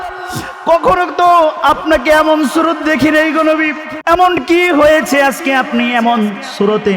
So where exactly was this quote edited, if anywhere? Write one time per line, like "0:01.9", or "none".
0:03.9